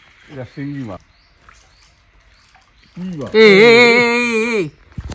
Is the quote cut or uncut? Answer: cut